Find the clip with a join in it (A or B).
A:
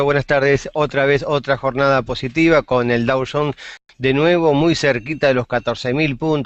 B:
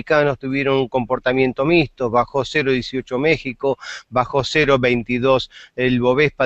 B